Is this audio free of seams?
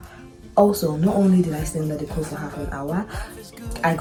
yes; 0 cuts

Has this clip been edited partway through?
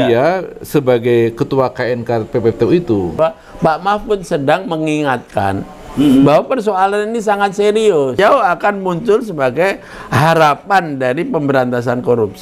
yes; 2 cuts; at 3.2 s, 8.2 s

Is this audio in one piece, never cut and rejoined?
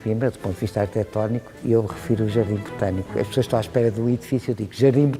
yes; 0 cuts

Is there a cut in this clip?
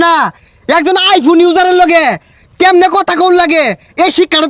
no; 0 cuts

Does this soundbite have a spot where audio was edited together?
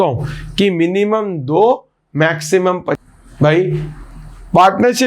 yes; 1 cut; at 3.0 s

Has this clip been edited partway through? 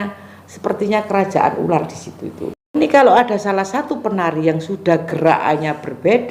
yes; 1 cut; at 2.7 s

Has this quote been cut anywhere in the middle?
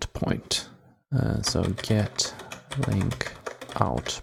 no; 0 cuts

